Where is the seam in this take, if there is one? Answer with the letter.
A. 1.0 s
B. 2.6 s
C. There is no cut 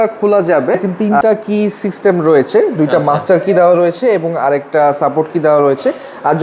A